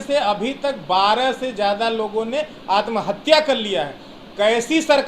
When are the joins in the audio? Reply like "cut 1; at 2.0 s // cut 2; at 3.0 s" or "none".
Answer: none